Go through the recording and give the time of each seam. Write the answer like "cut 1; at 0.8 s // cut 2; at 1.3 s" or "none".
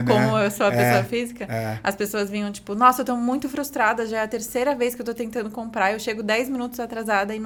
none